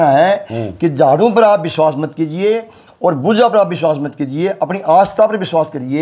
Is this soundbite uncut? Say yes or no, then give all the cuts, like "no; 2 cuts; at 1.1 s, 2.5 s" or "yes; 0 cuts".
yes; 0 cuts